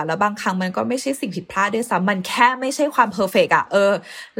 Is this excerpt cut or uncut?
uncut